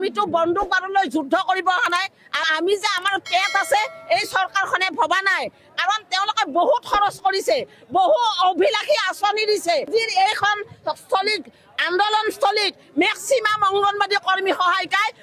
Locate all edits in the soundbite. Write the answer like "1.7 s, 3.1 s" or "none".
2.5 s, 9.9 s